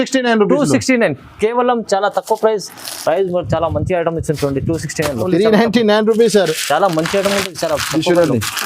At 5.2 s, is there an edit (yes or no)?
yes